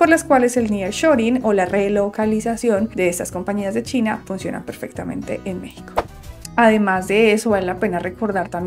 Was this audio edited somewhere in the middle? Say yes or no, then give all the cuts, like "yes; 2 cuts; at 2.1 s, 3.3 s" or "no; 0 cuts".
yes; 1 cut; at 6.0 s